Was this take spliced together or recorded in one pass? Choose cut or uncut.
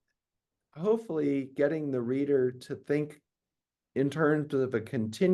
uncut